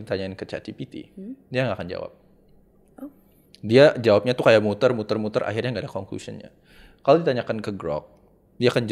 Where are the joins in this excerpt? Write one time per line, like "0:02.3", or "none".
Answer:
none

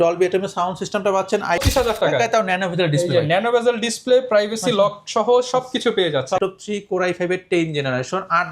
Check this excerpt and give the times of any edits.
0:01.6
0:06.4

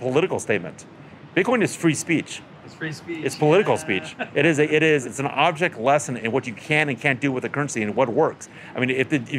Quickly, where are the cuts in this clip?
0:05.0

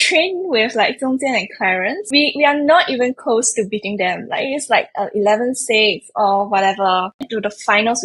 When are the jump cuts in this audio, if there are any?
0:02.0

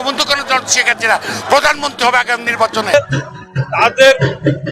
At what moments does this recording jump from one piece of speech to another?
0:02.9

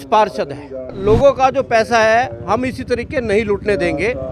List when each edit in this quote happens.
0:01.0

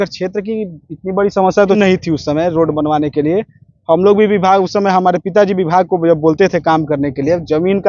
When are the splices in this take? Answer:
0:01.8

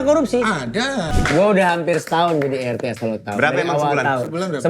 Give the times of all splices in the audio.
0:01.1

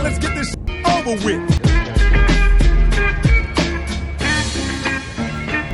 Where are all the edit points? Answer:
none

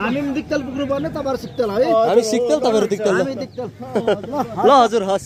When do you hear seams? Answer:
none

